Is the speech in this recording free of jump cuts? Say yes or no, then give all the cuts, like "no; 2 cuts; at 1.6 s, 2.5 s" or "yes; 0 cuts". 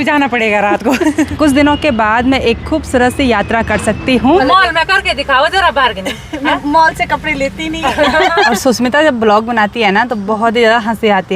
no; 3 cuts; at 1.3 s, 4.4 s, 8.5 s